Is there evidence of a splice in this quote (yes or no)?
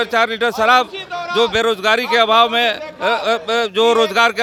no